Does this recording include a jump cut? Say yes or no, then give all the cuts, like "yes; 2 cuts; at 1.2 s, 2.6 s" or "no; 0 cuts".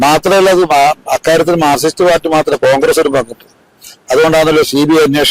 no; 0 cuts